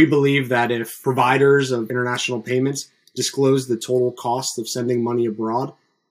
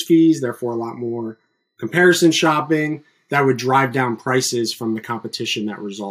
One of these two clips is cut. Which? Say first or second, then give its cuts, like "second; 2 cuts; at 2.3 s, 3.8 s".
first; 2 cuts; at 0.9 s, 1.9 s